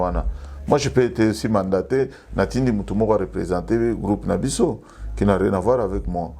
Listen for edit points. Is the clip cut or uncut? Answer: uncut